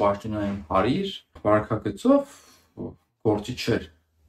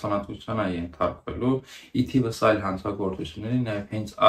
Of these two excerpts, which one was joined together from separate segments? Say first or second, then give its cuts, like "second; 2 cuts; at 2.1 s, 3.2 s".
first; 1 cut; at 1.4 s